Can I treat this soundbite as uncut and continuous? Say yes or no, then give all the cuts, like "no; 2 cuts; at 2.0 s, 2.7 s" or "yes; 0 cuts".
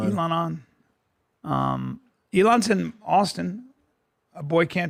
yes; 0 cuts